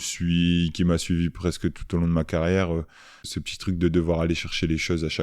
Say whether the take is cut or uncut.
cut